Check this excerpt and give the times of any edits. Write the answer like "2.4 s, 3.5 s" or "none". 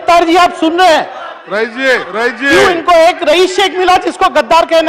2.1 s